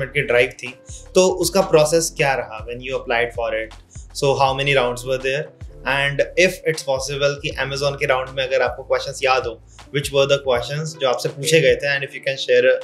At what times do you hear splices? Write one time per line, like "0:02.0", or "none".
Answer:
none